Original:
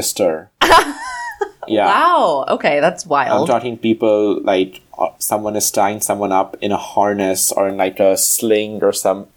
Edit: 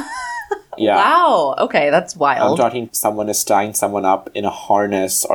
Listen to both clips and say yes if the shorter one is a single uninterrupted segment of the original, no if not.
no